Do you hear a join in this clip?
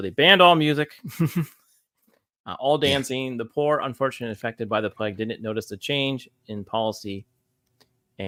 no; 0 cuts

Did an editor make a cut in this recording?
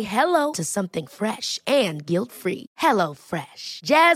no; 0 cuts

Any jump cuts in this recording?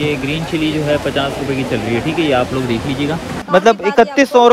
yes; 1 cut; at 3.4 s

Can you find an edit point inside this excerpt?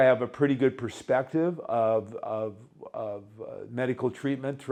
no; 0 cuts

